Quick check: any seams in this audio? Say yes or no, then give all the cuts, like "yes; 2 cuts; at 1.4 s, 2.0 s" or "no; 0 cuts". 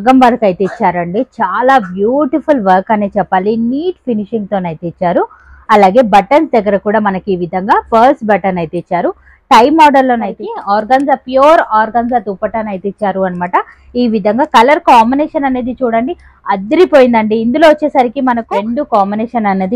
yes; 2 cuts; at 10.4 s, 18.4 s